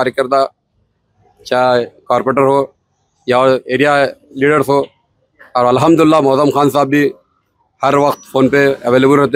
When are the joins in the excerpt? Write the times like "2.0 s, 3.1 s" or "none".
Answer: none